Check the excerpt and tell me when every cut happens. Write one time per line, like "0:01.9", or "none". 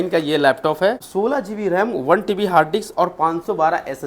0:01.1